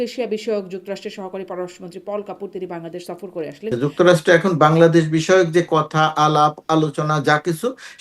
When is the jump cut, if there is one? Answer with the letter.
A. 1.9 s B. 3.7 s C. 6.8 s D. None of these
B